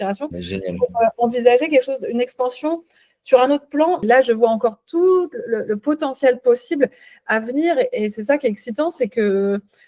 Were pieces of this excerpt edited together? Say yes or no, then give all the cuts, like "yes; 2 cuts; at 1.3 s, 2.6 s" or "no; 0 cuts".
yes; 1 cut; at 4.0 s